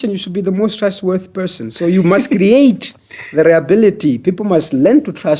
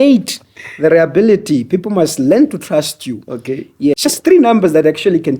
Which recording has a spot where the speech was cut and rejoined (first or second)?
second